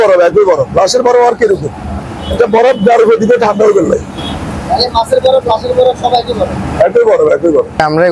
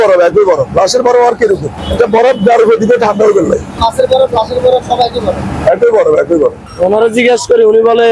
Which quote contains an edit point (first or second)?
second